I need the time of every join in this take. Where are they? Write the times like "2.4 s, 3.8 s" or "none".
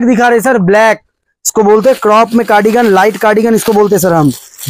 none